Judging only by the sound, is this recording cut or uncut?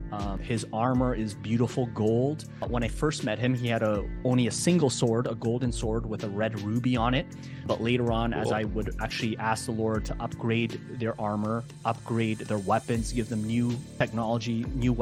uncut